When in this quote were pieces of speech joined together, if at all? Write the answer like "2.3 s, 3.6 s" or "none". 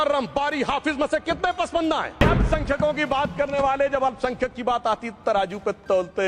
2.1 s

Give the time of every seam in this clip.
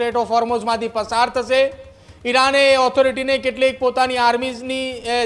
none

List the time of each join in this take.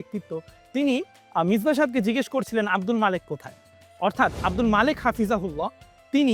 none

